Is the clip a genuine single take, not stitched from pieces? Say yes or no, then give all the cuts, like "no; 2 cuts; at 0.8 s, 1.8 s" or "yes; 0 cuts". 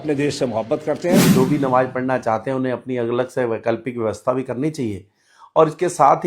no; 1 cut; at 1.2 s